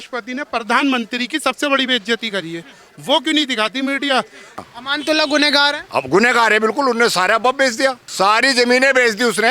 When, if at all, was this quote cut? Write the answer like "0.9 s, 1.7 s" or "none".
4.6 s, 8.0 s